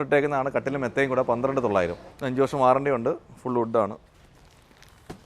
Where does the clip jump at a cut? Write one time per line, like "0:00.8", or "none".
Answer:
0:02.1